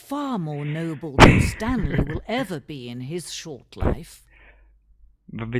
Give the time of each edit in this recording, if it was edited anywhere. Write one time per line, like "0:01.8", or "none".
none